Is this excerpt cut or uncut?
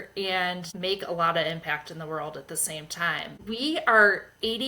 cut